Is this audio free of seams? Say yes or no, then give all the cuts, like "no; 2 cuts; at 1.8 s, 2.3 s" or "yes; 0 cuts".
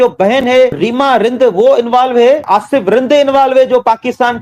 no; 2 cuts; at 0.8 s, 2.4 s